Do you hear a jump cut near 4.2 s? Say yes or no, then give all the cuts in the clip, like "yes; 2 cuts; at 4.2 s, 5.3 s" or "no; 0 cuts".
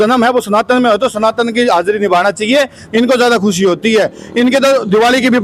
no; 1 cut; at 2.8 s